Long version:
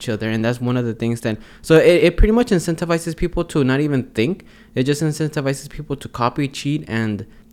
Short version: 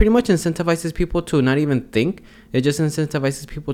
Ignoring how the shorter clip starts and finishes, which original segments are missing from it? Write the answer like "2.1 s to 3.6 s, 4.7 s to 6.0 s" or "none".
none

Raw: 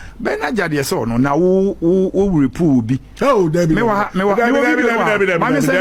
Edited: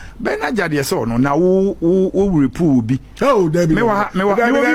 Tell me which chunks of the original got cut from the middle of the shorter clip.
none

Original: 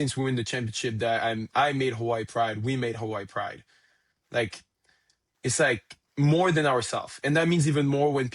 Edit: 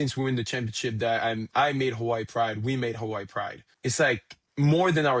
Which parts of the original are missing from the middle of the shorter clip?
3.6 s to 5.2 s

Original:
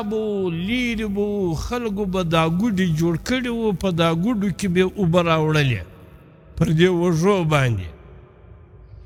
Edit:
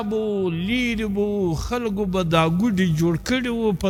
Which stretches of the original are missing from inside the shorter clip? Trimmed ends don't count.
none

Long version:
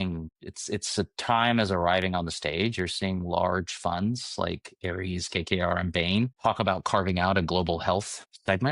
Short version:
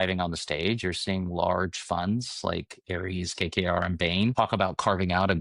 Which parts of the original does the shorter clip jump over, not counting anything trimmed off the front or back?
6.3 s to 6.4 s

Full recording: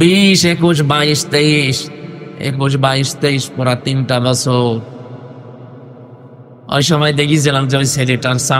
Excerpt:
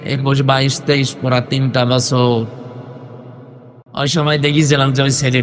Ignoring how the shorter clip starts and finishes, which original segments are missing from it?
6.1 s to 6.5 s

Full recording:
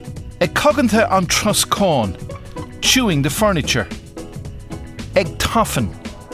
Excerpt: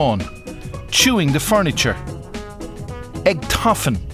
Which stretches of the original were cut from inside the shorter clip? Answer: none

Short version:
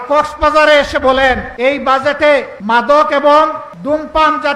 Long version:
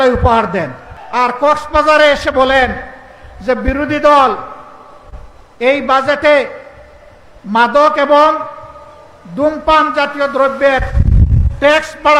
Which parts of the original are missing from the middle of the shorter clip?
2.8 s to 5.5 s, 6.6 s to 7.4 s, 8.5 s to 9.2 s

